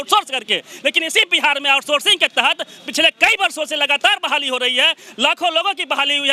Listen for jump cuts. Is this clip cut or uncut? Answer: uncut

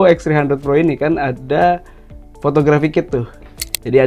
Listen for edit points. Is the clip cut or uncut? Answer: uncut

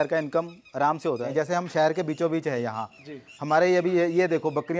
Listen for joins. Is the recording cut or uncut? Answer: cut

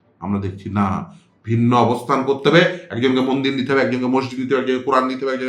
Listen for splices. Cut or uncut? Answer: uncut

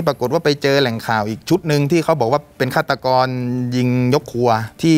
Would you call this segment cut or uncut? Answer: uncut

